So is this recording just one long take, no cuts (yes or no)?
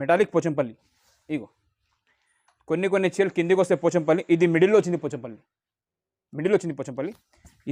yes